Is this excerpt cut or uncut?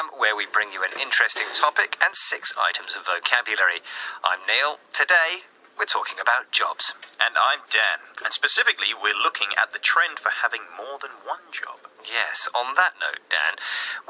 uncut